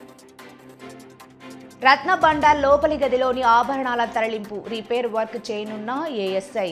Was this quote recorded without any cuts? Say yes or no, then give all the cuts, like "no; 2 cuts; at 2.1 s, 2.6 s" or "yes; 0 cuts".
yes; 0 cuts